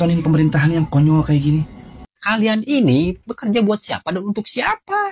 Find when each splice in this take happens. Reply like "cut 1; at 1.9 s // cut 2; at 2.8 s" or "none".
cut 1; at 2.0 s

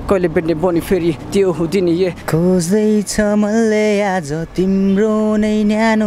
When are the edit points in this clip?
cut 1; at 2.2 s

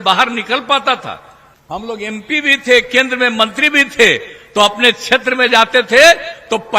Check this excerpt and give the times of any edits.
cut 1; at 1.5 s

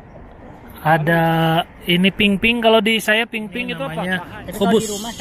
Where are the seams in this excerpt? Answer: cut 1; at 3.8 s

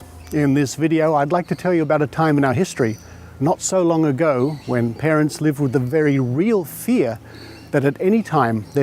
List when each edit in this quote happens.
cut 1; at 1.1 s

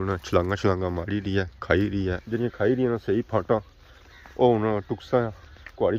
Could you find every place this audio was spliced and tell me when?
cut 1; at 2.2 s

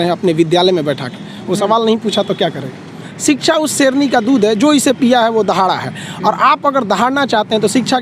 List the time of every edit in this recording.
cut 1; at 3.0 s

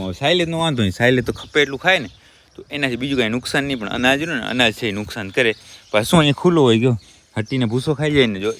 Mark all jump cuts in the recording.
none

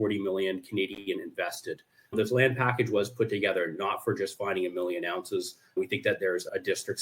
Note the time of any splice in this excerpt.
cut 1; at 2.1 s

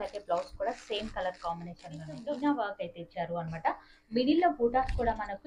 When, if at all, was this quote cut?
cut 1; at 2.4 s

